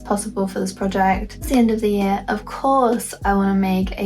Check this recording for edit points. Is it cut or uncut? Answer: cut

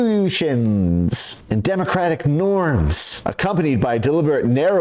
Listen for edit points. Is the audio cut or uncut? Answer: cut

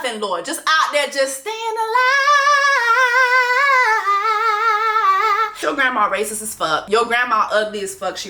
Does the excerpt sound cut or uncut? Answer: cut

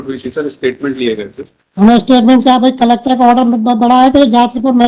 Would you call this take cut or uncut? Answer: uncut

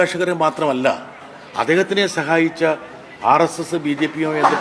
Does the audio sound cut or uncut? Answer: uncut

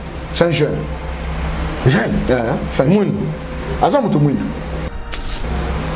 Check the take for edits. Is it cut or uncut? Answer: cut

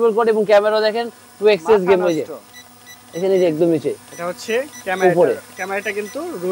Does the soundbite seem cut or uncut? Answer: uncut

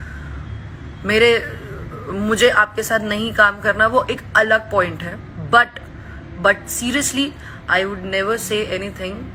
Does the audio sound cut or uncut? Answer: uncut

